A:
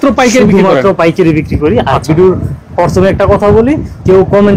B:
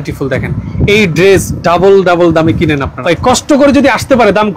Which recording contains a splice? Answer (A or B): B